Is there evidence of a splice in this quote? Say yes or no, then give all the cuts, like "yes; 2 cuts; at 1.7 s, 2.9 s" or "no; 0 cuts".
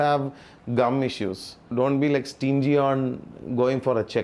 no; 0 cuts